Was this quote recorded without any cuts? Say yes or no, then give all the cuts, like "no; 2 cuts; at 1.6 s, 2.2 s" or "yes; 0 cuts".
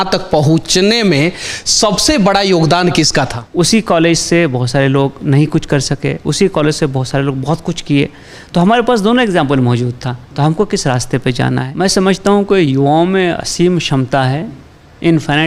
no; 2 cuts; at 3.4 s, 11.7 s